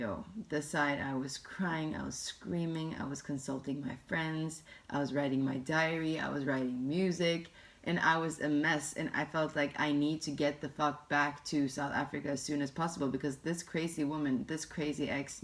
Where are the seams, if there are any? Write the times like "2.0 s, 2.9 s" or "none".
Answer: none